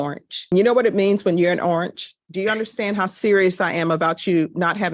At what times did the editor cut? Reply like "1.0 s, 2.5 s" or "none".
2.2 s